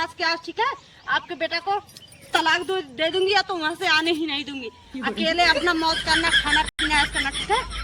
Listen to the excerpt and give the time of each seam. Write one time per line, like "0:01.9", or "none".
none